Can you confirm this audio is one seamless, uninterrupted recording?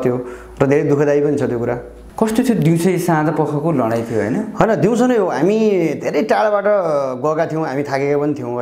yes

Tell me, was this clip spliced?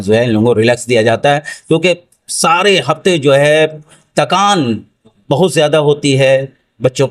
no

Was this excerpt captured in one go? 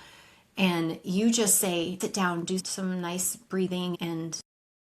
no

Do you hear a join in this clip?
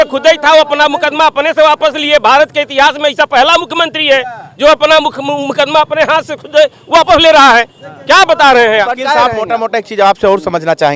no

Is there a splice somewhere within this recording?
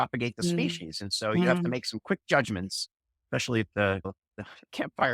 yes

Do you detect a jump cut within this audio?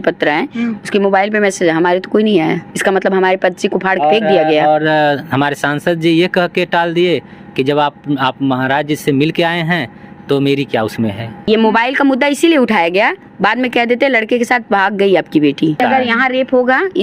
yes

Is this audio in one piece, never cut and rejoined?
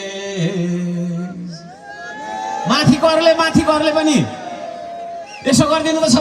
yes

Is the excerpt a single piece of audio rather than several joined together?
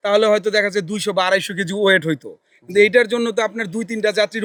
yes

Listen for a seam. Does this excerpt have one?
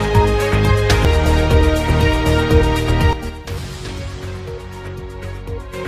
no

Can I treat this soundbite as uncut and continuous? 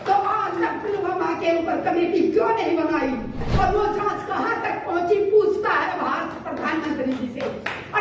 no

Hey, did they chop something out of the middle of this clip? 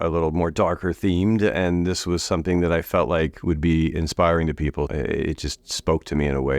yes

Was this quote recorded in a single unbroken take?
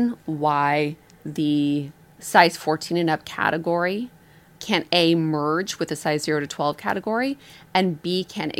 yes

